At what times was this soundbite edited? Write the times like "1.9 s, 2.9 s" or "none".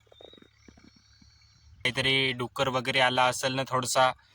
1.9 s